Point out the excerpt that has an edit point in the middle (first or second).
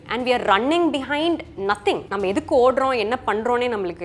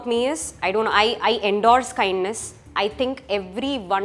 first